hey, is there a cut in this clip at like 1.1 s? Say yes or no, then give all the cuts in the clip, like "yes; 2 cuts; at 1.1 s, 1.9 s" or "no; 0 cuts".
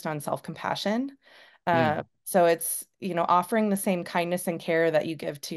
no; 0 cuts